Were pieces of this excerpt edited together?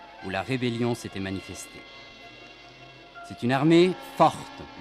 no; 0 cuts

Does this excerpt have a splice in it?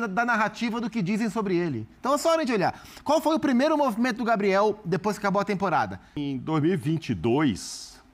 yes; 1 cut; at 6.2 s

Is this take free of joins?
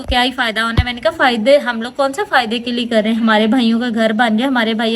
yes; 0 cuts

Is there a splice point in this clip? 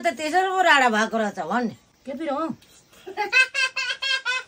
yes; 1 cut; at 1.9 s

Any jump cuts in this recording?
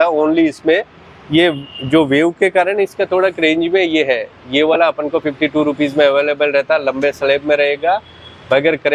no; 0 cuts

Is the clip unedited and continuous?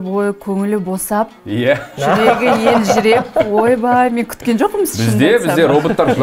yes; 0 cuts

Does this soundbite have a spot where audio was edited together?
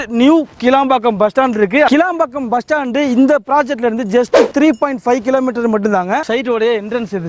yes; 2 cuts; at 1.9 s, 6.2 s

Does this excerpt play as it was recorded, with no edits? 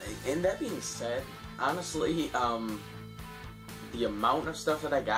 yes; 0 cuts

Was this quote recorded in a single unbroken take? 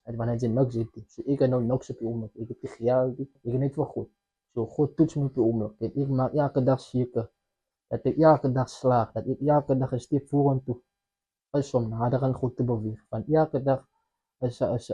no; 1 cut; at 3.4 s

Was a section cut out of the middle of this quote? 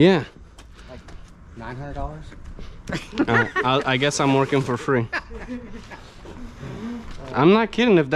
no; 0 cuts

